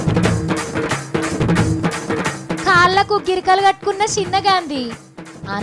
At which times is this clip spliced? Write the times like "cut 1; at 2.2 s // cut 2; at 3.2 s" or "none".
none